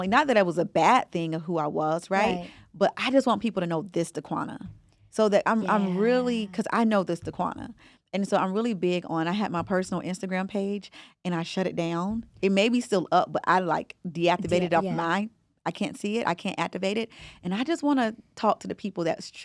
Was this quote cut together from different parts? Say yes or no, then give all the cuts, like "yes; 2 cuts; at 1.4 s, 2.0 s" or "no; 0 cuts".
no; 0 cuts